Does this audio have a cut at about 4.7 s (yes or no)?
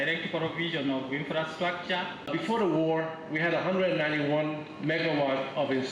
no